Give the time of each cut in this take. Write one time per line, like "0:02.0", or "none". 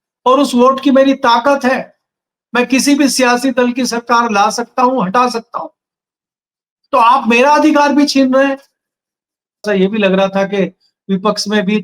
0:09.7